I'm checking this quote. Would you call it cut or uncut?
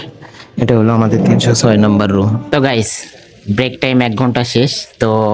cut